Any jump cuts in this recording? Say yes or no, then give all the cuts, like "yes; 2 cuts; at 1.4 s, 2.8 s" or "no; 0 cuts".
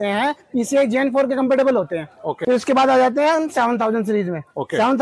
yes; 1 cut; at 2.3 s